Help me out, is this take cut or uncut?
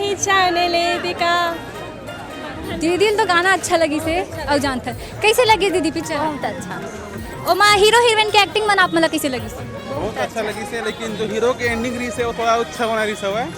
uncut